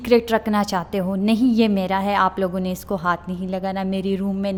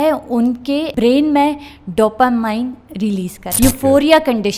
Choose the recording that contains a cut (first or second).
second